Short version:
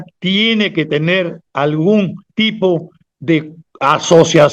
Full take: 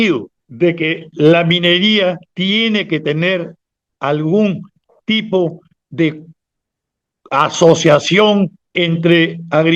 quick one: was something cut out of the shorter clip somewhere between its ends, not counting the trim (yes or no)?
yes